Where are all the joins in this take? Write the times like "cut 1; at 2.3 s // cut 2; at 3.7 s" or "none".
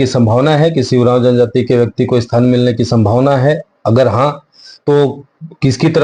none